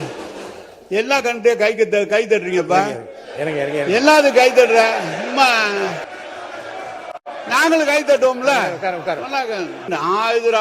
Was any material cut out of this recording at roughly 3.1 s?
no; 2 cuts; at 6.1 s, 9.9 s

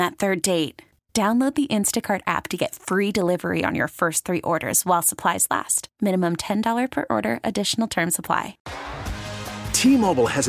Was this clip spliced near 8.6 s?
yes; 1 cut; at 8.6 s

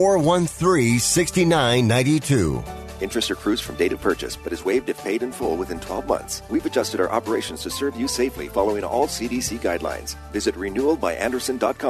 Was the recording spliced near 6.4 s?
yes; 1 cut; at 6.4 s

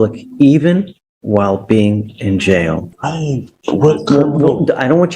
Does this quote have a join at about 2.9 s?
yes; 1 cut; at 2.9 s

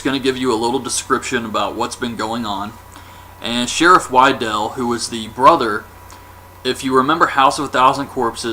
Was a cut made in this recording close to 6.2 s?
no; 0 cuts

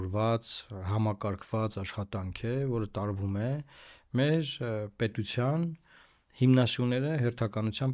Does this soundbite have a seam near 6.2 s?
no; 0 cuts

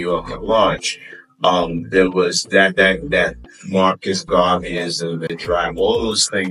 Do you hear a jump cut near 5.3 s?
yes; 1 cut; at 5.3 s

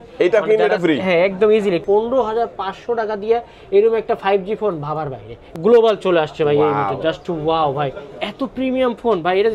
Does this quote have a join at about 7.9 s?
no; 2 cuts; at 1.8 s, 5.5 s

